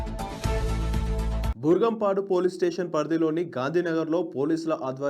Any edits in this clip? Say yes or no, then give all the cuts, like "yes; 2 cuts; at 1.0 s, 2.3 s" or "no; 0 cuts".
yes; 1 cut; at 1.5 s